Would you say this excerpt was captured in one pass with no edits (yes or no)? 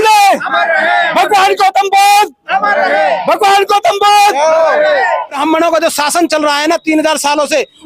no